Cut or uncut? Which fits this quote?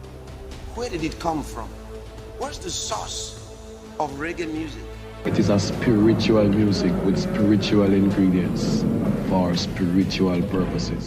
cut